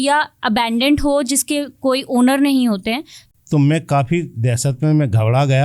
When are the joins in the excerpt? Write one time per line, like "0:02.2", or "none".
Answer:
0:03.1